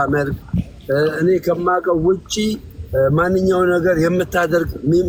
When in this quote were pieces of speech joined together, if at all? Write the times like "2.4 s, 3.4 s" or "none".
none